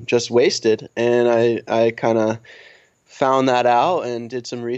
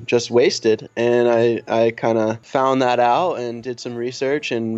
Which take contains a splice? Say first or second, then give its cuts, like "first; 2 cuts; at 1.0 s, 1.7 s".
second; 1 cut; at 2.4 s